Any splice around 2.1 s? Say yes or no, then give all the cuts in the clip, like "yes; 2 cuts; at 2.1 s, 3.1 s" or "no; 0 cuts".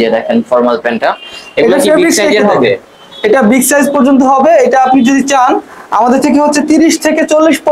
no; 0 cuts